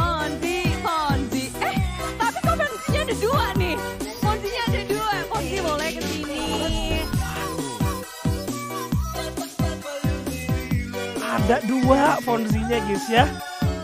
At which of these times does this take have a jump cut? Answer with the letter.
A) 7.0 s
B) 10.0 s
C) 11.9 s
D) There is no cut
D